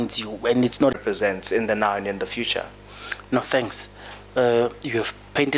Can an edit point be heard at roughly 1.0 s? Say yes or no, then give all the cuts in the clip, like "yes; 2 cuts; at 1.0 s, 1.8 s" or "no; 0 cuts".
yes; 1 cut; at 1.0 s